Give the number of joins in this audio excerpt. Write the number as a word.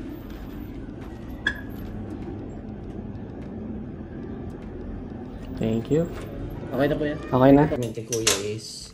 one